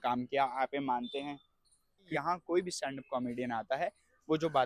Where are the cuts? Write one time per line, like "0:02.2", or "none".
0:02.2